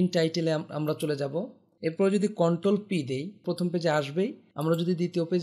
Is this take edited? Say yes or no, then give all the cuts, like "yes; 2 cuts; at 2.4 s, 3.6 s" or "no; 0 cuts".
yes; 3 cuts; at 1.6 s, 3.4 s, 4.5 s